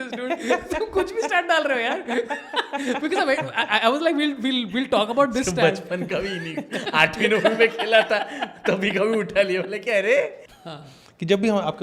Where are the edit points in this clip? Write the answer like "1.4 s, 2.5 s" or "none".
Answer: 10.4 s